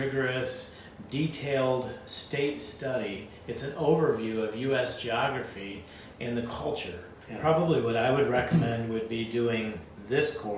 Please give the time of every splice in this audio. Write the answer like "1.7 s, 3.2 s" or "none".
7.1 s